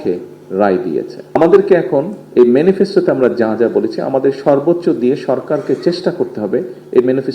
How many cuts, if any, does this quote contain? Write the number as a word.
one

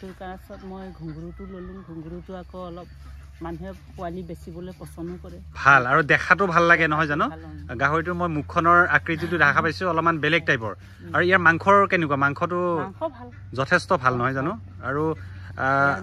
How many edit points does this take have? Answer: zero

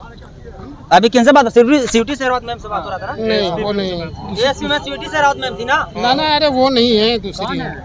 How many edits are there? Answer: zero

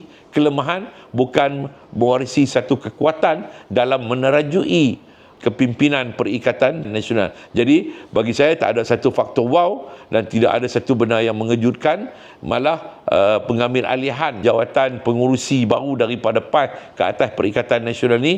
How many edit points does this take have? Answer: zero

